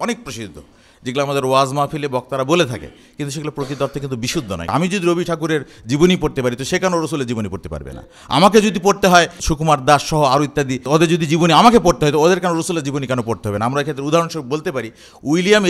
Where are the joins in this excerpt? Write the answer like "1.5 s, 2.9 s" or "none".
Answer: 4.7 s, 10.8 s